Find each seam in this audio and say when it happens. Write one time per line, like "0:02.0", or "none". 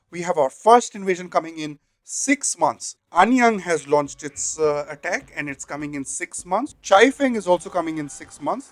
0:02.9
0:06.8